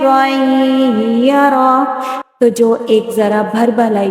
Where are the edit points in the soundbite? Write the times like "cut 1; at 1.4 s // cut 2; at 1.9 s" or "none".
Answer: cut 1; at 2.1 s